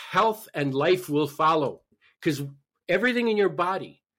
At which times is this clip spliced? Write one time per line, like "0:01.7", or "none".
0:02.0